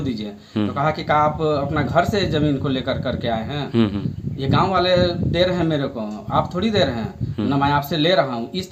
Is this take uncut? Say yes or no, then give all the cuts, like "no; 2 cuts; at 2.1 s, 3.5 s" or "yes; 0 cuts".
yes; 0 cuts